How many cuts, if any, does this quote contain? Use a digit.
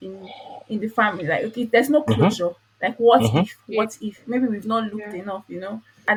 0